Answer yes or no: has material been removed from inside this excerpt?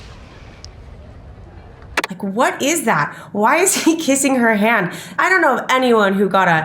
yes